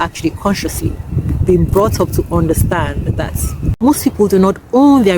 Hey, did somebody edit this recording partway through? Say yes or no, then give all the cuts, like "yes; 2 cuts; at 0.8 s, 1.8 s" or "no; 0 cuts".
yes; 2 cuts; at 1.1 s, 3.7 s